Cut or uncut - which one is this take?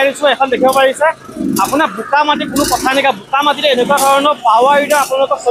uncut